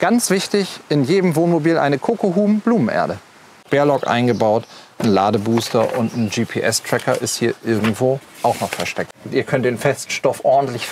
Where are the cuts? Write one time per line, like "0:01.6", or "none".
0:03.6
0:09.0